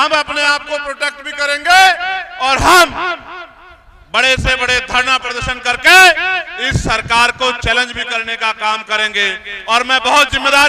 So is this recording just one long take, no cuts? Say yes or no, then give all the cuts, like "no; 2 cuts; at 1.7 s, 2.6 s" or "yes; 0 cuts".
yes; 0 cuts